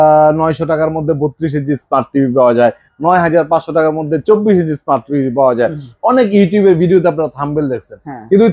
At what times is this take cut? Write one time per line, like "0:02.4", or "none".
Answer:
none